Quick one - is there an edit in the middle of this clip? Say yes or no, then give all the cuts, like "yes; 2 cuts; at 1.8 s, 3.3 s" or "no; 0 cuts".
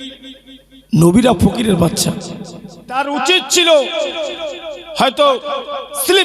yes; 1 cut; at 3.0 s